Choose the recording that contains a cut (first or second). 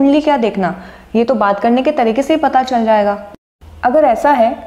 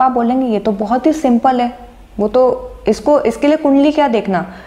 first